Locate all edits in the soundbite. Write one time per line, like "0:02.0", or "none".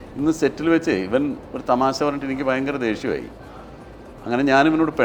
none